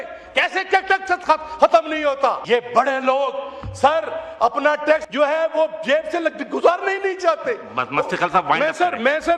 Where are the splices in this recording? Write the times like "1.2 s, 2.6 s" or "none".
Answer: 2.4 s, 5.1 s